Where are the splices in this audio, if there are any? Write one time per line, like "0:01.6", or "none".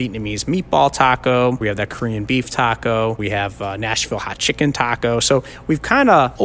none